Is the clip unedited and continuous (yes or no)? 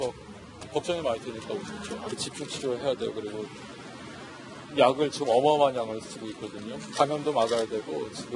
yes